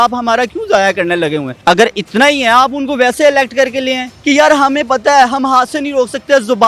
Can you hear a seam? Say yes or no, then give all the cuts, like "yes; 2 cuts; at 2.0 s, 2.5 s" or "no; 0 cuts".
yes; 2 cuts; at 1.5 s, 4.1 s